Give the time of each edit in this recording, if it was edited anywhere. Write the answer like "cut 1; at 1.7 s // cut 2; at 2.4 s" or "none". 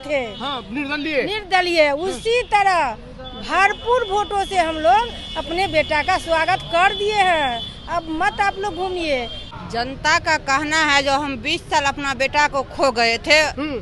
cut 1; at 9.4 s